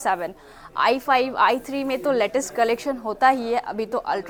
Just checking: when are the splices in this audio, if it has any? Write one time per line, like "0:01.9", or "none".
none